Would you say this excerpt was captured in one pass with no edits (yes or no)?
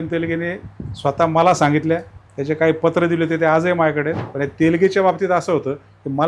no